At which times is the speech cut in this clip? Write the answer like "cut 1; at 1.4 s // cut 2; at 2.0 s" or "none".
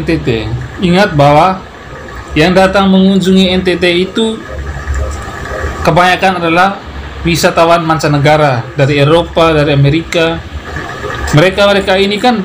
cut 1; at 10.5 s